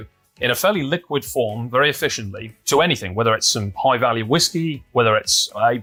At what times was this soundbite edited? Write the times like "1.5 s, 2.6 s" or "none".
none